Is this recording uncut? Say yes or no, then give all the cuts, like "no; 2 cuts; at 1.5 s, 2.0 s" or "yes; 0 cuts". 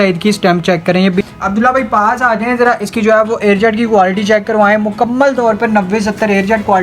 no; 1 cut; at 1.2 s